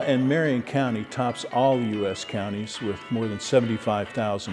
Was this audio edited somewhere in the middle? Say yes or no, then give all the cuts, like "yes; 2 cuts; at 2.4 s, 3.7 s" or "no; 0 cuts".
yes; 1 cut; at 3.0 s